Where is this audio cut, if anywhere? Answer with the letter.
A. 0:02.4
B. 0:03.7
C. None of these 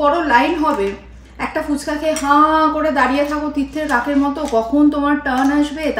C